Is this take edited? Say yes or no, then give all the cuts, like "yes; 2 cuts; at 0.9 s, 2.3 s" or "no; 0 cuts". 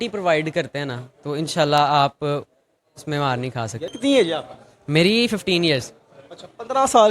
yes; 1 cut; at 3.9 s